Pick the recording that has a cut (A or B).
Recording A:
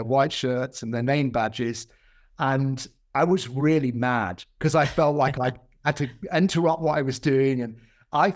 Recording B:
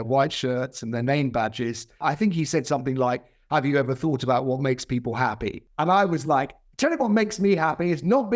B